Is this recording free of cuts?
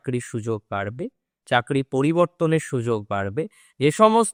yes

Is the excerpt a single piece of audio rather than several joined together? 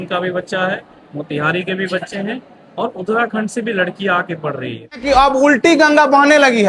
no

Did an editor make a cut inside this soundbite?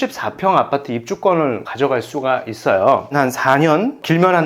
yes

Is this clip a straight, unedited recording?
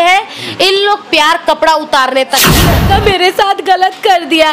no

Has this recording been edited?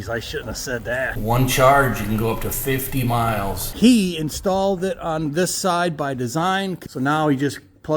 yes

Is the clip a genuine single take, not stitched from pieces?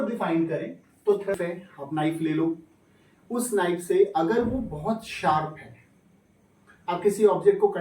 no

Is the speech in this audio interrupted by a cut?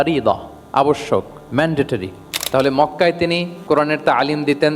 yes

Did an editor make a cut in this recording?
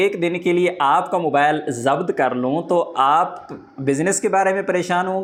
no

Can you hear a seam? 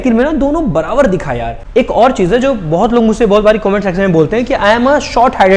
yes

